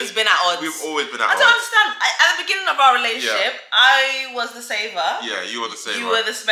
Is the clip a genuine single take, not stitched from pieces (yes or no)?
yes